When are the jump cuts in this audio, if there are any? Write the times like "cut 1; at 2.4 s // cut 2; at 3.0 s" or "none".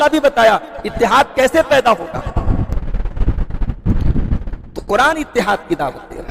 cut 1; at 2.7 s